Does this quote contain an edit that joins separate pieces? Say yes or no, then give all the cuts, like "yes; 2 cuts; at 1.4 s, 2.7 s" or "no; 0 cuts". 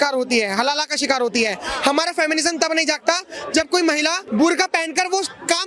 yes; 1 cut; at 4.2 s